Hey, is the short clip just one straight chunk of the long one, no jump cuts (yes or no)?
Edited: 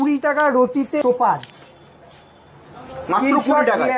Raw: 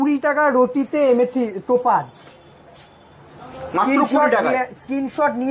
no